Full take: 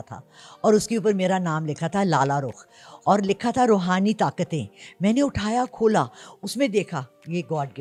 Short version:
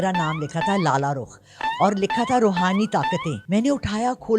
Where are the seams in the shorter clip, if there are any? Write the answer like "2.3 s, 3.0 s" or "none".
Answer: 3.3 s

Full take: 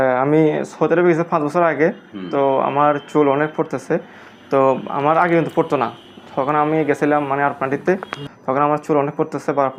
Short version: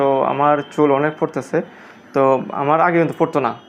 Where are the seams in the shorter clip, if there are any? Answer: none

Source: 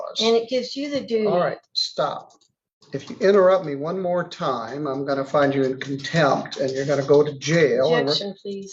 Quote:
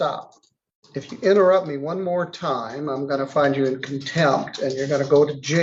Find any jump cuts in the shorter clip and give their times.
none

